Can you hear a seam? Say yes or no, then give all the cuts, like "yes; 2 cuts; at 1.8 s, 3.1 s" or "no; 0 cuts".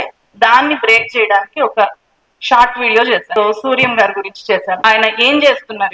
yes; 2 cuts; at 3.3 s, 4.8 s